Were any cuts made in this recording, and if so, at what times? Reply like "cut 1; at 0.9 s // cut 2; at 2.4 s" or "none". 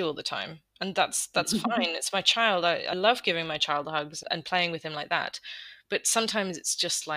cut 1; at 2.9 s // cut 2; at 4.2 s